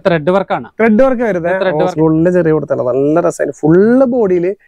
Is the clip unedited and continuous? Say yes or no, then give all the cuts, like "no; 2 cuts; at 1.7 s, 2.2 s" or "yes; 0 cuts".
no; 1 cut; at 1.9 s